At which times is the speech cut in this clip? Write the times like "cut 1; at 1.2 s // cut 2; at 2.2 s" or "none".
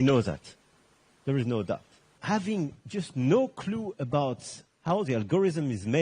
cut 1; at 2.2 s